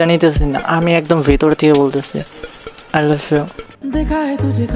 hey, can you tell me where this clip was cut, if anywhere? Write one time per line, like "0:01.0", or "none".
0:03.8

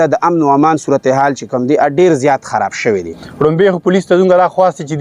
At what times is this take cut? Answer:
0:03.2

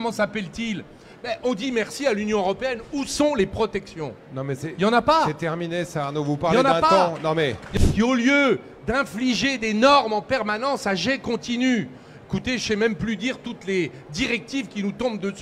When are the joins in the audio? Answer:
0:07.7

